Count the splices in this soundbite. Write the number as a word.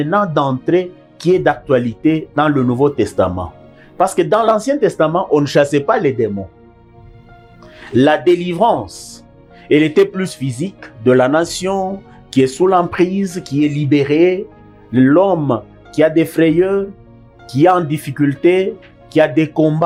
zero